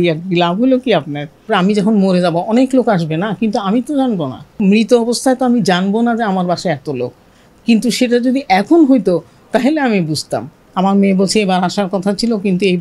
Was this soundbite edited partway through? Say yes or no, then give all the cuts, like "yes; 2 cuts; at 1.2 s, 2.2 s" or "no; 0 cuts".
yes; 3 cuts; at 1.5 s, 4.6 s, 10.6 s